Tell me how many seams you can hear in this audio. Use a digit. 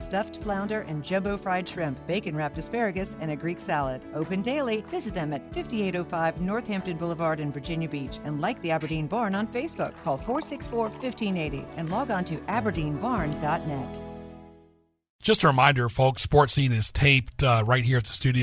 1